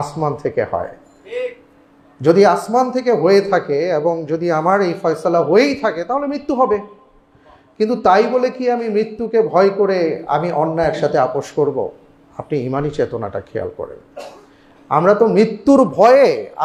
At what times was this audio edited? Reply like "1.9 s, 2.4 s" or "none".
none